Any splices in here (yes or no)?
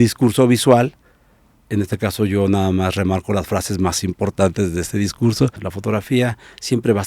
yes